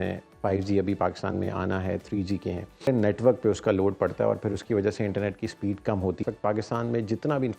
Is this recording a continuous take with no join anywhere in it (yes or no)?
no